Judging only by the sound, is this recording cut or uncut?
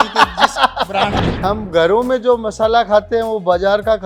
cut